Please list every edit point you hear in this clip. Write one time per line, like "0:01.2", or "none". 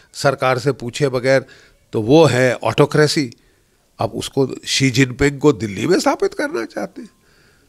none

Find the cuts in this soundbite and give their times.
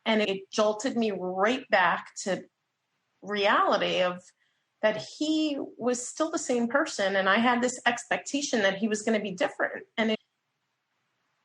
0:03.2

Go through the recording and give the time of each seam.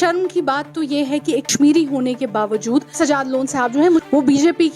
0:01.5
0:02.9
0:04.0

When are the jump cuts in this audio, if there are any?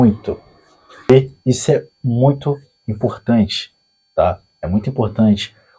0:01.1

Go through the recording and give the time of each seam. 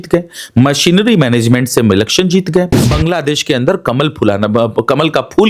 0:02.8

